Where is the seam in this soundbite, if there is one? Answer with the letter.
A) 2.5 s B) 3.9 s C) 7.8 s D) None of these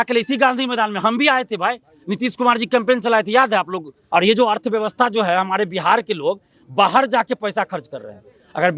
B